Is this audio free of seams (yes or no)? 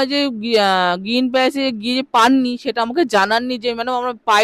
yes